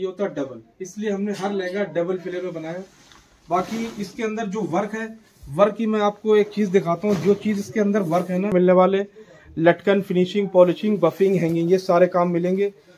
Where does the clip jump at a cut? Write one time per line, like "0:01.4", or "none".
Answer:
0:08.5